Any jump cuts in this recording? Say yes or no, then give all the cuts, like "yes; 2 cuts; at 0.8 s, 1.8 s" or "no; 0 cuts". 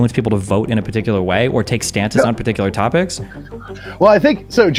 no; 0 cuts